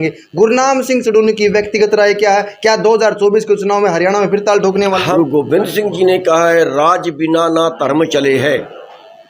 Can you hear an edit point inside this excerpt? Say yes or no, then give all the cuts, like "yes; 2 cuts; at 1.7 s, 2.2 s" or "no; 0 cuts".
yes; 1 cut; at 5.0 s